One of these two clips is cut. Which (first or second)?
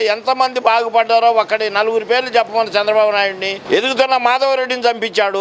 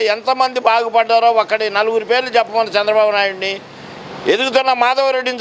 first